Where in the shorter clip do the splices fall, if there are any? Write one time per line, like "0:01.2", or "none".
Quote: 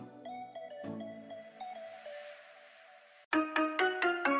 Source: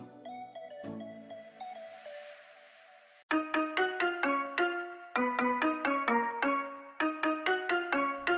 0:03.1